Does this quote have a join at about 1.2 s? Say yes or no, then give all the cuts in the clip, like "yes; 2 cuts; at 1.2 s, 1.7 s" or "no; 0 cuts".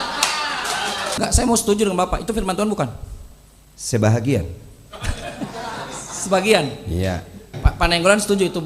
yes; 2 cuts; at 1.2 s, 7.6 s